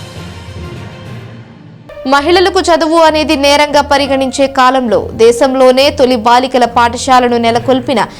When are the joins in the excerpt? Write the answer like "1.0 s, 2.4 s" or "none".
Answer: 1.3 s